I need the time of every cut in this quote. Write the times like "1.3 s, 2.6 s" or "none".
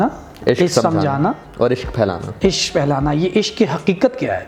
none